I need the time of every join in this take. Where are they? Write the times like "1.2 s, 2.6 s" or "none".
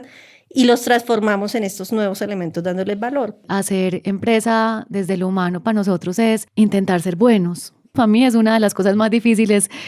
3.4 s, 6.5 s, 7.9 s